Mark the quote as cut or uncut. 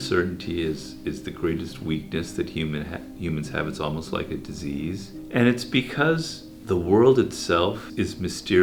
uncut